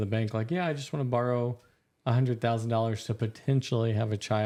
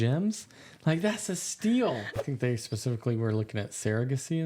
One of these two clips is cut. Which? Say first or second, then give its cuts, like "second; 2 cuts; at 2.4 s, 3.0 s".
second; 1 cut; at 2.1 s